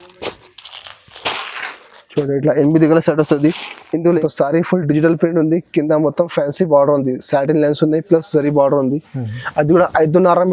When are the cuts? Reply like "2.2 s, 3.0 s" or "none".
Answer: 4.2 s